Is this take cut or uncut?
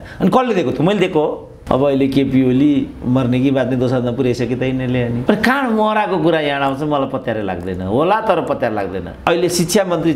cut